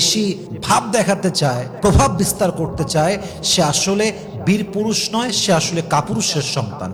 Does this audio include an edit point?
no; 0 cuts

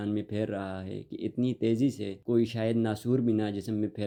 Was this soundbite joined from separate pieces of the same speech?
no; 0 cuts

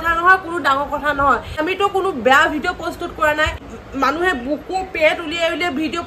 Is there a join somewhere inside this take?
yes; 2 cuts; at 1.5 s, 3.8 s

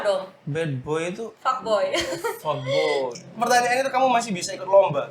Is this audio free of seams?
no; 1 cut; at 3.1 s

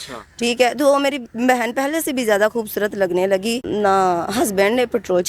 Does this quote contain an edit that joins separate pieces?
yes; 1 cut; at 3.6 s

